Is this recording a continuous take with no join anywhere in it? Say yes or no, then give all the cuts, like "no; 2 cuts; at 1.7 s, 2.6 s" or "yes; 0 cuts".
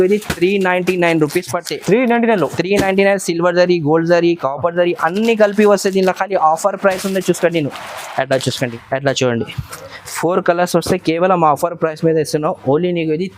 no; 1 cut; at 8.7 s